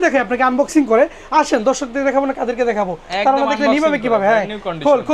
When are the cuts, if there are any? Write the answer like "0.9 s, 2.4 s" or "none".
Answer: none